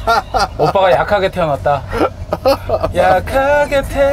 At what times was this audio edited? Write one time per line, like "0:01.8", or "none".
none